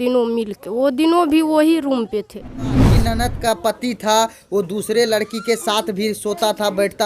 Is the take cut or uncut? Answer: cut